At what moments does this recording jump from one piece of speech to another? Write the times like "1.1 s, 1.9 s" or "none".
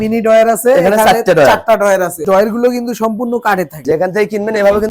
2.2 s, 3.8 s